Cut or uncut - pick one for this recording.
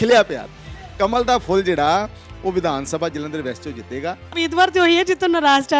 cut